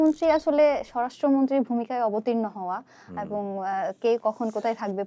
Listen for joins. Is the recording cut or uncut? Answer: uncut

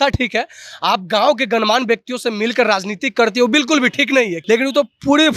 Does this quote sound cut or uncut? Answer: cut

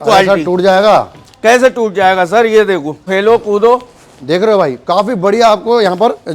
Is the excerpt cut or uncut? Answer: cut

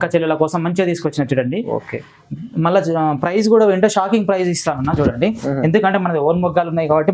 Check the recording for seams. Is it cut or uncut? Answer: uncut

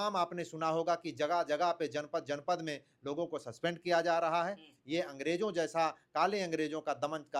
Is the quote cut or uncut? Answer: uncut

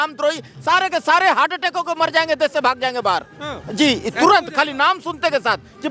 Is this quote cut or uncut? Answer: uncut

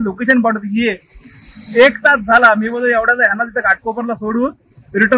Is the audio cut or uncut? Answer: uncut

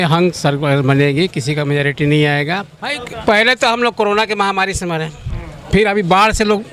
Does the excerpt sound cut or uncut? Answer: cut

